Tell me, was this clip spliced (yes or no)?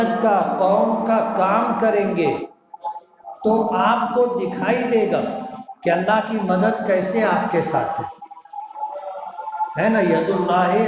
no